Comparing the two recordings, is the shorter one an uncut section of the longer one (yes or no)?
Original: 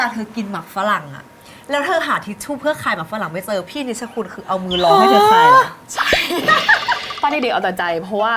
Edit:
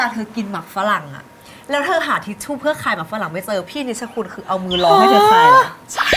yes